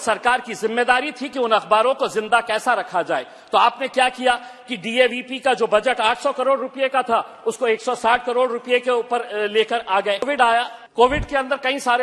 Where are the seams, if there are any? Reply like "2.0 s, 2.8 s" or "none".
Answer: 10.3 s

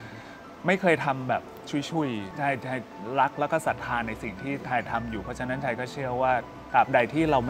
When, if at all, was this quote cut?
2.3 s

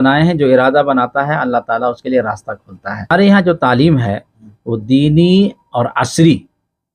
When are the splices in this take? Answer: 3.1 s

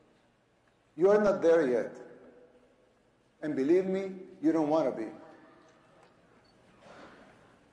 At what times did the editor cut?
4.2 s

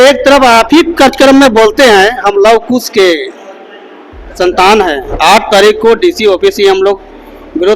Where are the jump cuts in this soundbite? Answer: 5.1 s

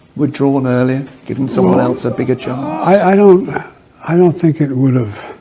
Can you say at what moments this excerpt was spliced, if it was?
1.2 s

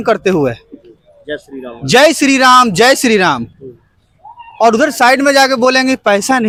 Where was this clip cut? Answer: none

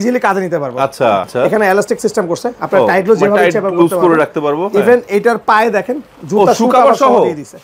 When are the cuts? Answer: 1.3 s

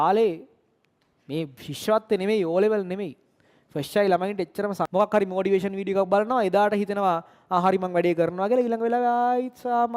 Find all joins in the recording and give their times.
4.8 s

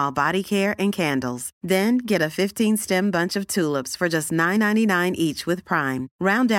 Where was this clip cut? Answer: none

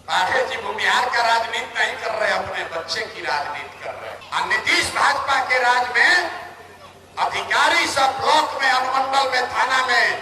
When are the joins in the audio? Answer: 4.1 s

